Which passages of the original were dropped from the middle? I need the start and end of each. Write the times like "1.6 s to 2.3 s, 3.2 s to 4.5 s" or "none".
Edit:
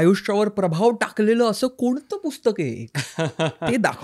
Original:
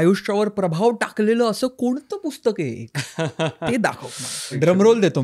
none

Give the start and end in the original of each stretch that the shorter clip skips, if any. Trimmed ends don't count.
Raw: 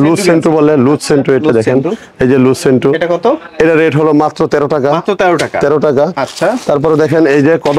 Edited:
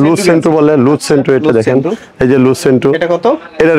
none

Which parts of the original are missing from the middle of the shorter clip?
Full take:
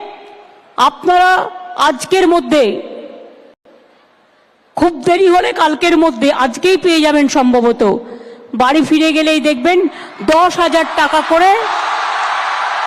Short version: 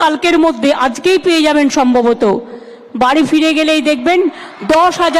none

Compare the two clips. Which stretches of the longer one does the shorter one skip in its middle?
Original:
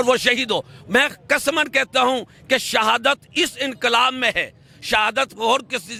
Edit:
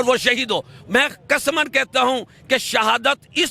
none

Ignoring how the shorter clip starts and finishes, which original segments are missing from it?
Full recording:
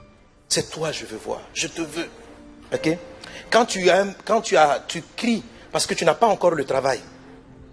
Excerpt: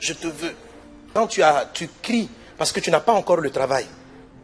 2.6 s to 4.2 s

